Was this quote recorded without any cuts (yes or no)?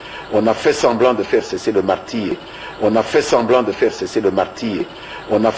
yes